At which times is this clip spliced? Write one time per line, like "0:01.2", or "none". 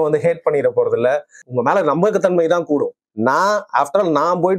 0:01.4